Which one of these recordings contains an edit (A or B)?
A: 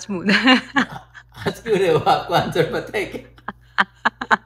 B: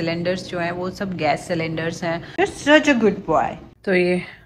B